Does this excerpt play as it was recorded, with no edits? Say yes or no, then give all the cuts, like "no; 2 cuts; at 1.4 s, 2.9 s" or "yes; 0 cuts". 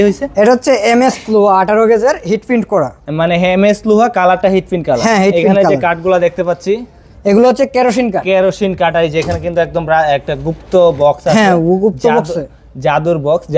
yes; 0 cuts